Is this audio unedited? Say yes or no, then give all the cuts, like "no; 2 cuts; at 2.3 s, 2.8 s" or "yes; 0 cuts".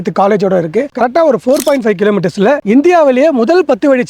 no; 1 cut; at 0.9 s